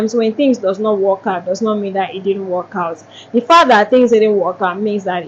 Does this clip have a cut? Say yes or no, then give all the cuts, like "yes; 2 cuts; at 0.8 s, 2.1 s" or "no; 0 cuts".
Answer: no; 0 cuts